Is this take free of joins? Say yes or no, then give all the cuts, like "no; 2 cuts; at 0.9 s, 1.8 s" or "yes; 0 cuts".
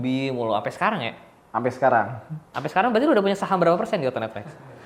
yes; 0 cuts